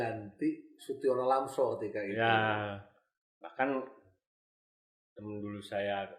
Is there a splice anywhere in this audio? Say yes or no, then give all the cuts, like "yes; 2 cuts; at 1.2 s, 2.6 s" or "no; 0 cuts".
no; 0 cuts